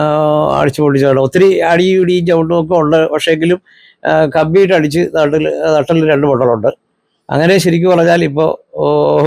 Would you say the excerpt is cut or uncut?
uncut